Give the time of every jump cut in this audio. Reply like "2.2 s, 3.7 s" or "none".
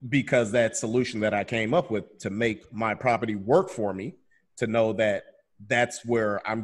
none